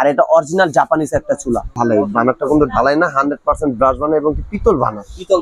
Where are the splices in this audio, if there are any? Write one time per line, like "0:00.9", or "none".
0:01.7